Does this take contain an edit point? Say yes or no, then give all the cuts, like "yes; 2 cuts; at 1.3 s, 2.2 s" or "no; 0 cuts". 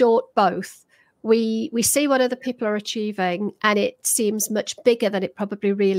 no; 0 cuts